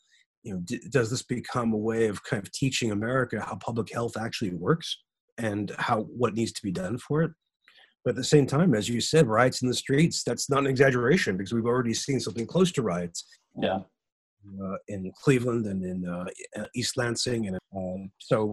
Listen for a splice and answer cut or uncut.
cut